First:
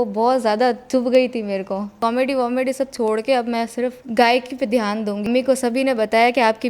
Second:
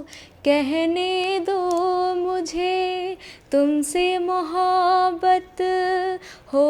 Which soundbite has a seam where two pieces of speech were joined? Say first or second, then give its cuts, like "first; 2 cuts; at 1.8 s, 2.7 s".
first; 2 cuts; at 2.0 s, 5.3 s